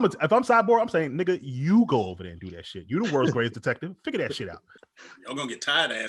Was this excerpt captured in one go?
no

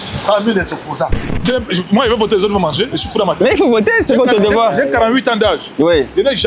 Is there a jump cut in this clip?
yes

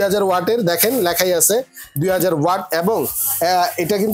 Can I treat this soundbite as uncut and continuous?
yes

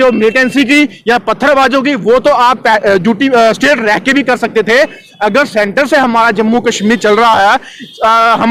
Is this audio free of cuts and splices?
yes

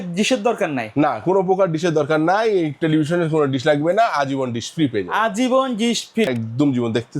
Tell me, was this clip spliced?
yes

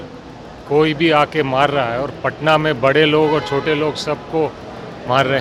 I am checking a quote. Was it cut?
no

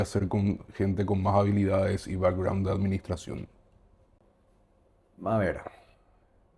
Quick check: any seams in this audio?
no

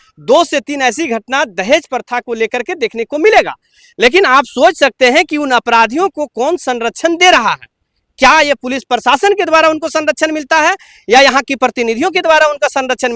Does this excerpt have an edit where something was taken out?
no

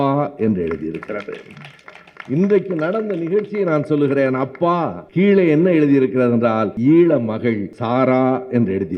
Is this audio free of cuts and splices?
no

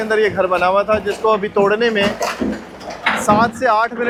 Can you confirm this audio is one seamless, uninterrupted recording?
yes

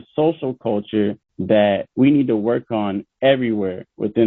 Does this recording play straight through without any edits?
yes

